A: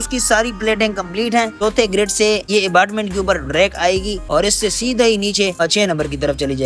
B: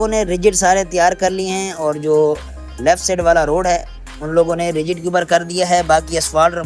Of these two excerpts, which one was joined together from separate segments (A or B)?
A